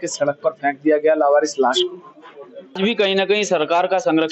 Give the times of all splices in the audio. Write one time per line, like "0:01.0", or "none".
0:02.8

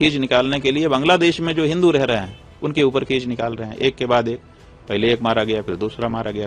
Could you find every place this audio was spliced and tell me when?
none

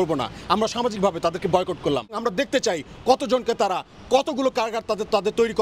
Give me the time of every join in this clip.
0:02.2

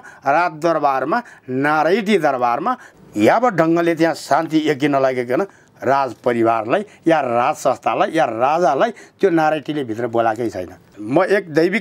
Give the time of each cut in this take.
0:02.9
0:10.9

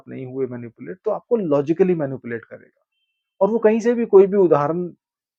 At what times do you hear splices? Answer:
none

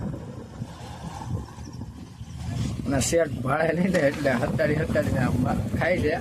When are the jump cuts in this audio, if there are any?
none

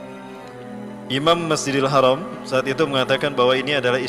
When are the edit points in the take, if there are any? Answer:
0:01.0

